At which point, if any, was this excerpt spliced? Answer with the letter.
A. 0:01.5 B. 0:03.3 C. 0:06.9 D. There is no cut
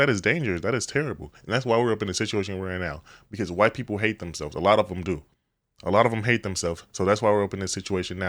D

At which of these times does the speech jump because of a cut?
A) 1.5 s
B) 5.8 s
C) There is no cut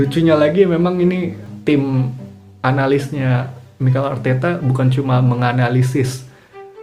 A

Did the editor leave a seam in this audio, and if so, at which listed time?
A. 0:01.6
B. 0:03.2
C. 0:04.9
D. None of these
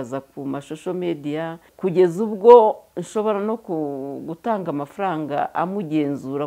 A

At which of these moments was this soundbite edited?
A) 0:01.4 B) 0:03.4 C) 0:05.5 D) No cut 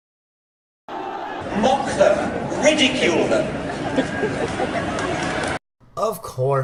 D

